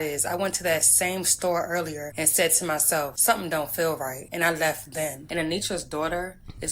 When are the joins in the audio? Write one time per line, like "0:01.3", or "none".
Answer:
0:02.0
0:03.1
0:04.2
0:05.2